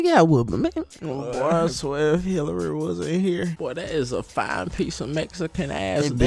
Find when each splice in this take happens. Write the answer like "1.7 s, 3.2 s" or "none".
3.6 s

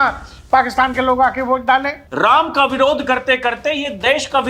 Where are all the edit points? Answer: 2.0 s

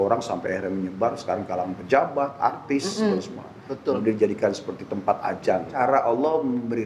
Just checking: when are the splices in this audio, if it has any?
5.7 s

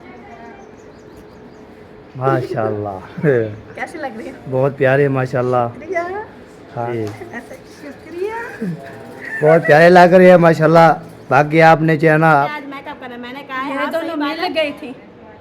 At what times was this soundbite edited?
2.1 s, 6.9 s, 12.4 s

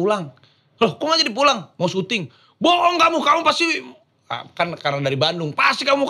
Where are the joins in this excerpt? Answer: none

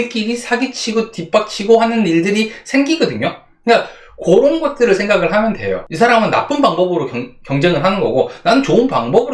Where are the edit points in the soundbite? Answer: 5.8 s

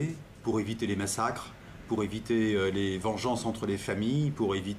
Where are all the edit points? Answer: 1.1 s

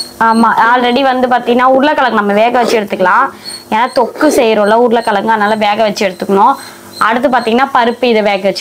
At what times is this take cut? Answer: none

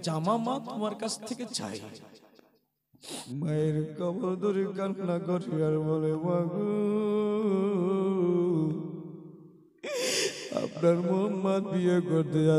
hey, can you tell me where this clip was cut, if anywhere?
3.2 s

